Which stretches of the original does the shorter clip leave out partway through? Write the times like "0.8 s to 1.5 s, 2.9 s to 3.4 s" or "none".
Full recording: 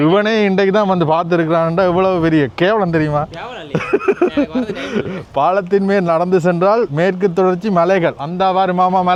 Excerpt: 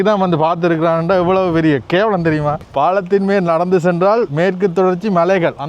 3.3 s to 5.2 s